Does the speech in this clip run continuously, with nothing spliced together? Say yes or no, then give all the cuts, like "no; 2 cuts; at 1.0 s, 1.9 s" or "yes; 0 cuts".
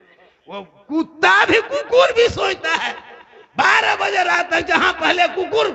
yes; 0 cuts